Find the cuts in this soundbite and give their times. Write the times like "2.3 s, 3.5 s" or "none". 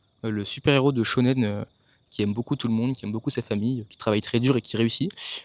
none